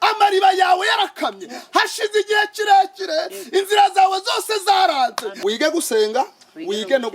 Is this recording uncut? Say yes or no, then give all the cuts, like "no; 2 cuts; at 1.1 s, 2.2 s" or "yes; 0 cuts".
no; 1 cut; at 5.3 s